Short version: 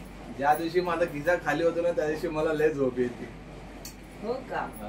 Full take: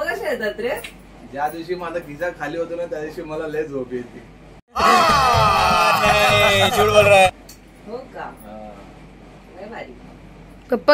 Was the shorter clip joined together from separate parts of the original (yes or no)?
yes